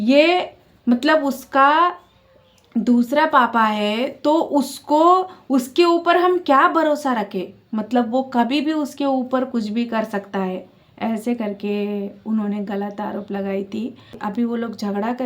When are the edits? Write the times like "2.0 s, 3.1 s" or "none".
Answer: 14.2 s